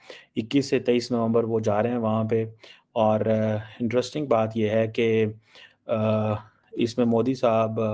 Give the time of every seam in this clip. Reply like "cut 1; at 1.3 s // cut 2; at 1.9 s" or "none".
none